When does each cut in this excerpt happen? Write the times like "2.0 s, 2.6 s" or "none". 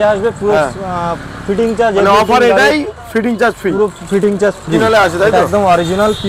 4.8 s